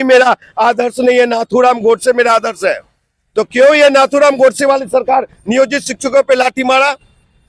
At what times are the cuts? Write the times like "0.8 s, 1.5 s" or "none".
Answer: none